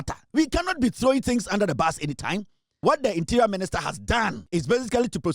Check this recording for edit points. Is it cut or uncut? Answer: cut